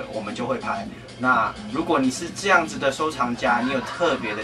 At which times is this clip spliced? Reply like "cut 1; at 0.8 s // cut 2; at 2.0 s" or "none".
none